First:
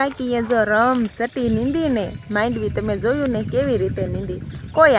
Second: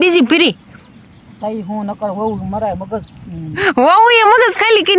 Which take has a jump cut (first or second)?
second